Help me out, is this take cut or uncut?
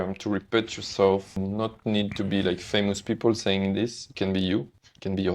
cut